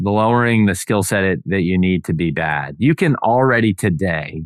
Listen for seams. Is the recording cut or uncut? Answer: uncut